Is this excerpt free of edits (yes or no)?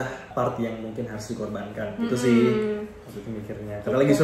yes